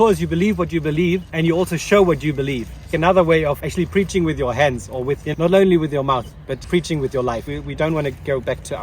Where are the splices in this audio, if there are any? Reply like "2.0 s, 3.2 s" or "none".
1.3 s, 2.9 s, 3.6 s, 5.3 s, 6.6 s, 7.5 s